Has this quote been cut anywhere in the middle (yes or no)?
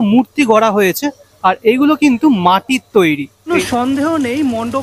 yes